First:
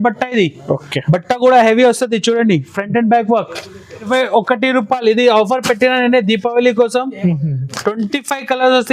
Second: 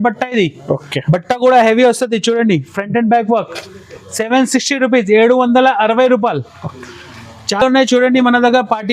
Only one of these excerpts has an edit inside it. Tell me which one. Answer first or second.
first